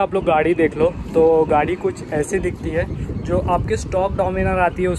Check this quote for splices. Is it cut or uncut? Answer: uncut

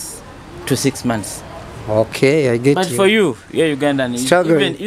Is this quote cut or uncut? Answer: uncut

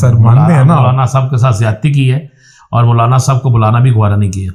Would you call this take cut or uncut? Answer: uncut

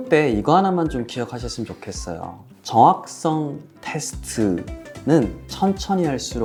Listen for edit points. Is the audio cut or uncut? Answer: uncut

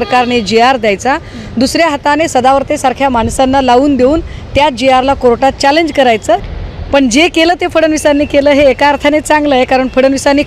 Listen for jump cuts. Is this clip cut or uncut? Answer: cut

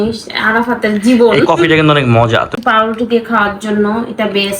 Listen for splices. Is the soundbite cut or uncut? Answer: cut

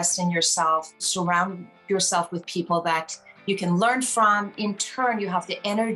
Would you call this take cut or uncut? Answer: cut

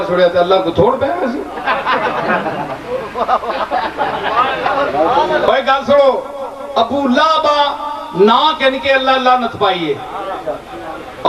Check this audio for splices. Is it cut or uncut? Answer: cut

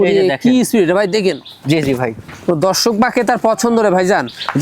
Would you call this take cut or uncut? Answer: uncut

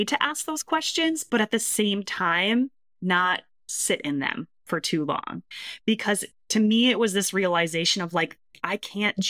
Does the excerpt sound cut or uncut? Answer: uncut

